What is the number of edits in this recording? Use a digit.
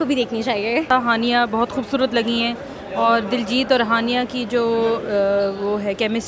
1